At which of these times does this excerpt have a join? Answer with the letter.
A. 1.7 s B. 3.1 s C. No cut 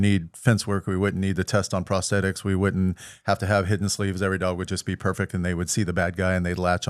C